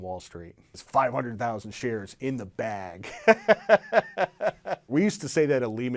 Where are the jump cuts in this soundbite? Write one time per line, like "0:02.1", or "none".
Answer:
0:04.9